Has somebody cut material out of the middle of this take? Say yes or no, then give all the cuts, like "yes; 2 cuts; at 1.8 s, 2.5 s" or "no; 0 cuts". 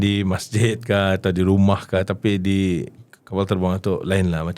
yes; 1 cut; at 2.0 s